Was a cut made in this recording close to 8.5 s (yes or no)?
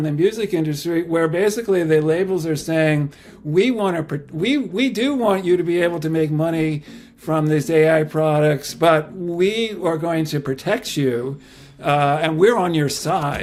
no